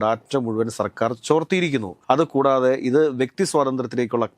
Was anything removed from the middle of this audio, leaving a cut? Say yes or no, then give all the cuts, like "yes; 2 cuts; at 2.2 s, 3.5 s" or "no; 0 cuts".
yes; 1 cut; at 1.9 s